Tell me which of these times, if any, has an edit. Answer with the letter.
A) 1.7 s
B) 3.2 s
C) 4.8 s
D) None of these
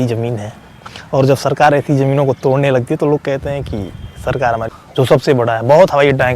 C